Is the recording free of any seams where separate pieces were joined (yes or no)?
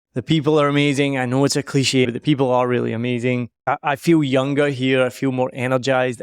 no